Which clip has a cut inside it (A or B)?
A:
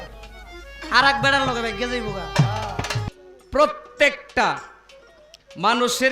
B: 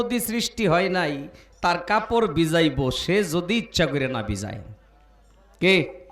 A